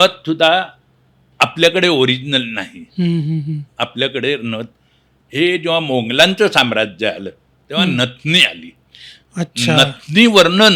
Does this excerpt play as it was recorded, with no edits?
yes; 0 cuts

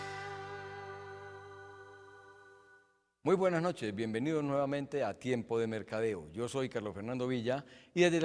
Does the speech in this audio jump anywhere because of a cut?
yes; 1 cut; at 1.4 s

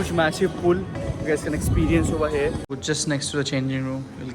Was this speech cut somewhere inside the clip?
yes; 1 cut; at 2.8 s

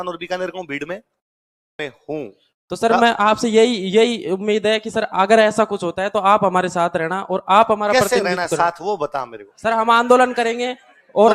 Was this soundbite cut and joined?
yes; 1 cut; at 1.8 s

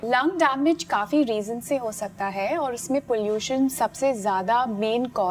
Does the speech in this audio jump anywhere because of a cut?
no; 0 cuts

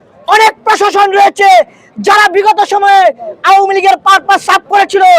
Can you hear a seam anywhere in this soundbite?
no; 0 cuts

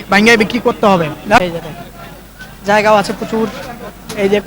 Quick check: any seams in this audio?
yes; 1 cut; at 1.4 s

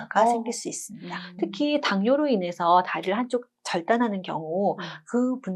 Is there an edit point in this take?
yes; 1 cut; at 1.2 s

